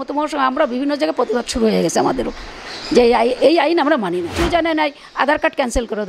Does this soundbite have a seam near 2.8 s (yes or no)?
no